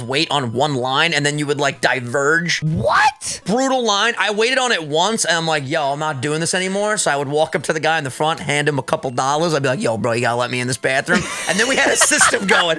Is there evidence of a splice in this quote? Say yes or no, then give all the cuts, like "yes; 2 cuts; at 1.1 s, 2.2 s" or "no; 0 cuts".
yes; 1 cut; at 2.9 s